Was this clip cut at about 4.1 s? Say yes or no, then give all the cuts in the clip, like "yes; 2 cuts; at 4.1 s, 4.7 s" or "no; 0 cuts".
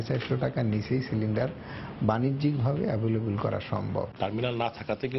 yes; 1 cut; at 4.1 s